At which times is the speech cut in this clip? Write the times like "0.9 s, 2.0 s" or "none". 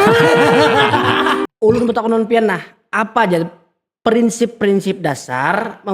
1.5 s